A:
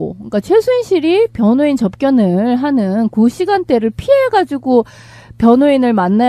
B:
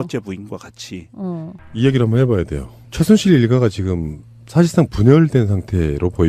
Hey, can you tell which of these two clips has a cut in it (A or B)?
B